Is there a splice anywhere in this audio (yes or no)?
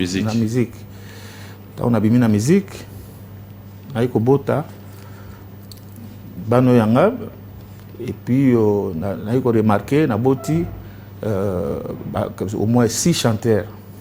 no